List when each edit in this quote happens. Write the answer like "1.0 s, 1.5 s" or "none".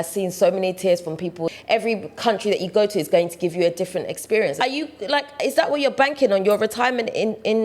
1.5 s, 4.6 s